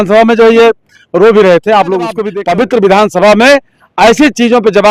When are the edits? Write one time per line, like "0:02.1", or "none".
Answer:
0:02.3